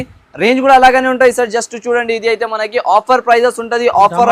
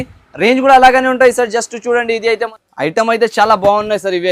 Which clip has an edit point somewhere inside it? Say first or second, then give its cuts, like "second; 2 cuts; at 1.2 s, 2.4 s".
second; 1 cut; at 2.5 s